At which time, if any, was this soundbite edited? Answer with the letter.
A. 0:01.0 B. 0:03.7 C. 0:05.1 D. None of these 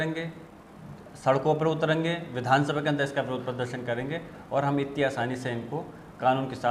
D